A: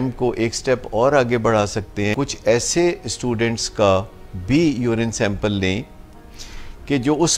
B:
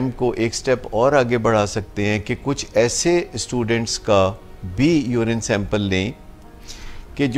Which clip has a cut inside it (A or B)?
A